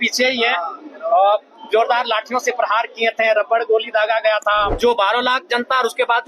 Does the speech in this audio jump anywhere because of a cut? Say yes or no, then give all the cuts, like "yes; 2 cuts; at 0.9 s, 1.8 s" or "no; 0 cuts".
yes; 1 cut; at 4.7 s